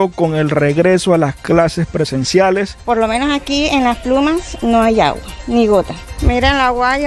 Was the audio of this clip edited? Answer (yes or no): yes